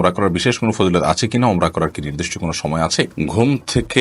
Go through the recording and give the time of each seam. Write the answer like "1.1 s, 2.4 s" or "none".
3.1 s